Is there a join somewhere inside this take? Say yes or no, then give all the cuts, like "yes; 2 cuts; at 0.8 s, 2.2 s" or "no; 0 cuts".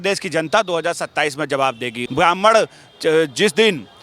yes; 1 cut; at 2.0 s